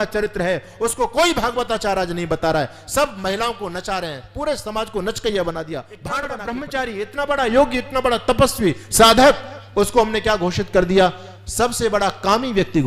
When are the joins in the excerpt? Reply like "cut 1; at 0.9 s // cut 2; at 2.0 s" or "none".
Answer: cut 1; at 6.3 s